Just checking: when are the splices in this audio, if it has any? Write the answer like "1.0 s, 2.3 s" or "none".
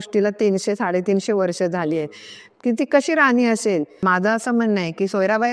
4.0 s